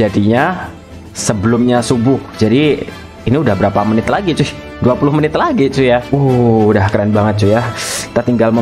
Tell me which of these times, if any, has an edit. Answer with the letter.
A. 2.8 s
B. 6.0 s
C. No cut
B